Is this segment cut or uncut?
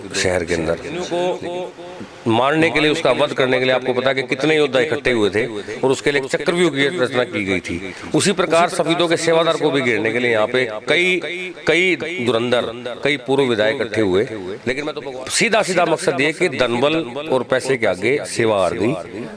cut